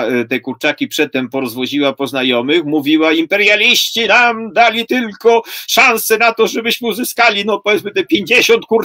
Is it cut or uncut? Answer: uncut